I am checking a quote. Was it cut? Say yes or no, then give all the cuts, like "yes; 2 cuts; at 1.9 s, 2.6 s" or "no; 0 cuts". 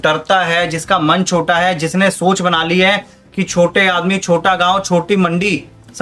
no; 0 cuts